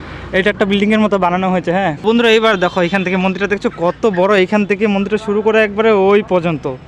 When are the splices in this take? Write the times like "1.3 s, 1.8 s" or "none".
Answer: 2.0 s